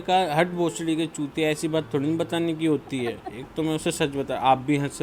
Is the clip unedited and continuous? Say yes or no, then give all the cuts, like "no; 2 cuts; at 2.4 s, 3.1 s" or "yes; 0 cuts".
yes; 0 cuts